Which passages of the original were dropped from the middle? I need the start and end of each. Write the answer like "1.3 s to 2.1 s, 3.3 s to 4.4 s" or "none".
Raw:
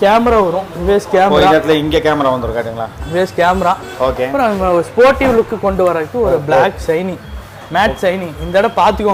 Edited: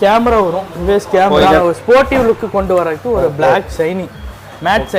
1.6 s to 4.7 s